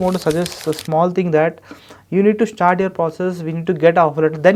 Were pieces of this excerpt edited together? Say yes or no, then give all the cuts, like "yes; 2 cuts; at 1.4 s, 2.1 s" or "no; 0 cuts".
no; 0 cuts